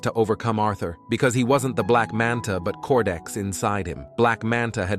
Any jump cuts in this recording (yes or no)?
no